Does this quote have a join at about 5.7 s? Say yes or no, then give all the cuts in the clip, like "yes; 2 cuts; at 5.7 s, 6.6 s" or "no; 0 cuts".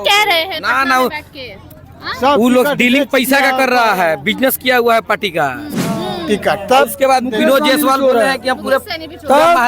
yes; 1 cut; at 5.7 s